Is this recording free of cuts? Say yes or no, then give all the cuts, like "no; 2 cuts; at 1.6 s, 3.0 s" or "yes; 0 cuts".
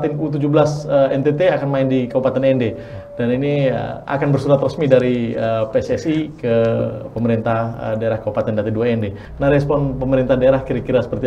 no; 1 cut; at 9.2 s